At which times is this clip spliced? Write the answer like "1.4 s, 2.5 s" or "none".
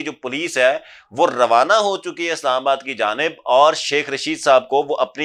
none